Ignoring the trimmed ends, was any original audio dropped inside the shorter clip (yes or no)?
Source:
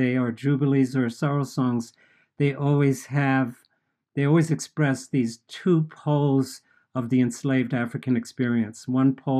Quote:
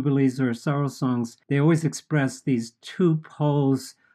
yes